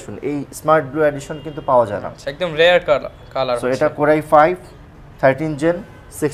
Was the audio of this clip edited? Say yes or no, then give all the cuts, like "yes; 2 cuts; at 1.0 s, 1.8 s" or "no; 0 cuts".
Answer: no; 0 cuts